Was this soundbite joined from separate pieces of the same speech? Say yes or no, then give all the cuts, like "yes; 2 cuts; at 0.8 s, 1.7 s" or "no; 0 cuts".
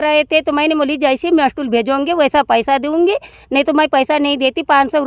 no; 0 cuts